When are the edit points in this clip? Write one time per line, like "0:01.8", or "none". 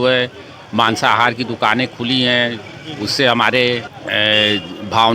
0:03.9

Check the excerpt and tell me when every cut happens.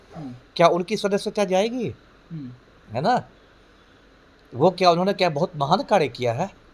none

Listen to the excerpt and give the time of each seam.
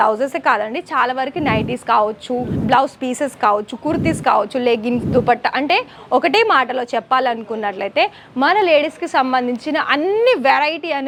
none

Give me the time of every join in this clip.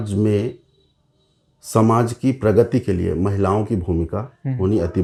none

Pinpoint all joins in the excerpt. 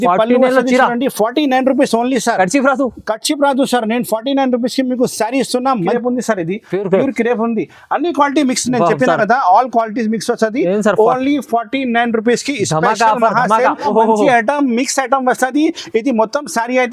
0:06.0
0:13.8

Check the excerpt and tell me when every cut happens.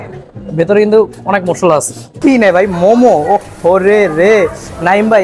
0:02.1

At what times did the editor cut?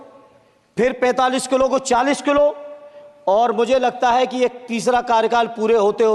none

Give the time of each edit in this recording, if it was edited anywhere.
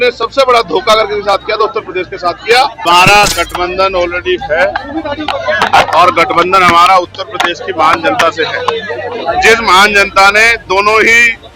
0:02.8

